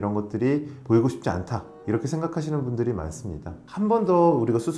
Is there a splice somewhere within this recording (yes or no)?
yes